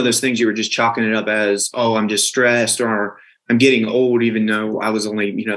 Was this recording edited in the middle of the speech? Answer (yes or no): no